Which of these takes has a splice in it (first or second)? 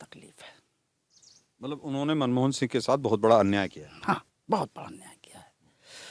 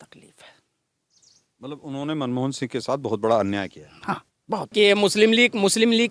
second